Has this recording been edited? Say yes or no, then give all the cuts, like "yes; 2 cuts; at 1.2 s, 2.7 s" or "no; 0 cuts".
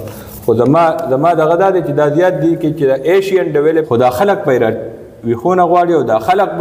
yes; 1 cut; at 3.9 s